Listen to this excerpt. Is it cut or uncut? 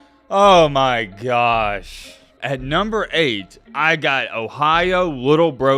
cut